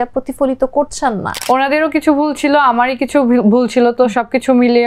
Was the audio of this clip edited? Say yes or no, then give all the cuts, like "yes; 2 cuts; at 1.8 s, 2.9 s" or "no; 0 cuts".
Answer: yes; 1 cut; at 1.3 s